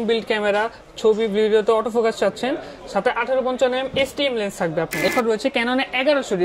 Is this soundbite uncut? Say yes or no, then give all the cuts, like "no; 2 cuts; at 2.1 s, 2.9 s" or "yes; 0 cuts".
no; 1 cut; at 5.1 s